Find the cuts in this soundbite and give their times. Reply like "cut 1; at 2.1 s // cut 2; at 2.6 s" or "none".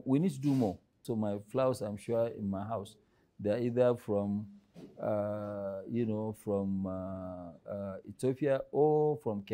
cut 1; at 1.0 s